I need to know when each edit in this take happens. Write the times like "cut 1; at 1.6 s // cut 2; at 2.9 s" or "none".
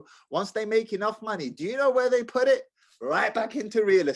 none